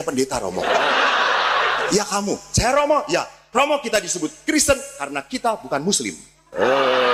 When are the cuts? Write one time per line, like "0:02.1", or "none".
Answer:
0:01.9